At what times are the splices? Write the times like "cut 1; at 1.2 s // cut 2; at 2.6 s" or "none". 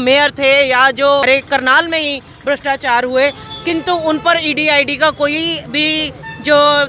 cut 1; at 1.2 s